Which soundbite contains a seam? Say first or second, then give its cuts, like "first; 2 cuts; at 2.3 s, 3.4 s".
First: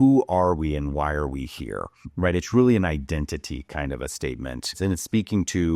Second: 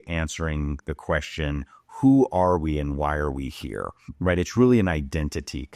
first; 1 cut; at 4.8 s